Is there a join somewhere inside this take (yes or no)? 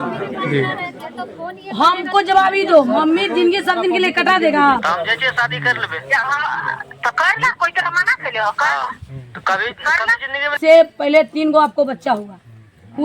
yes